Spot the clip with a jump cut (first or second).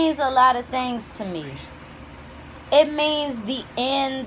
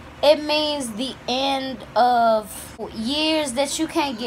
second